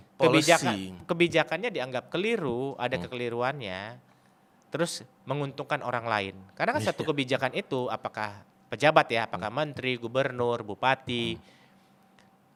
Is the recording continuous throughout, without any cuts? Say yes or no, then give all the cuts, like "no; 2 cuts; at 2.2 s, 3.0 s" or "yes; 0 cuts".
yes; 0 cuts